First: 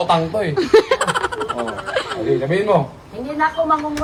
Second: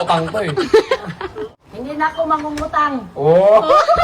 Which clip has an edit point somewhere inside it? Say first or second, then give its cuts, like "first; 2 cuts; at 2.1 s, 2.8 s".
second; 1 cut; at 1.5 s